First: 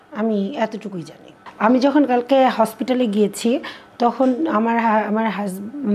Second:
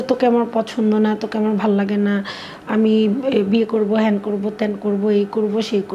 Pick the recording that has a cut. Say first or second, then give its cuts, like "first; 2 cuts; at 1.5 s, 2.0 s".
first; 1 cut; at 1.4 s